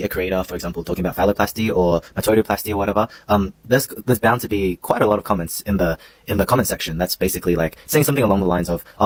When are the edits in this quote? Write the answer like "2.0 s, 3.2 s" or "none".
none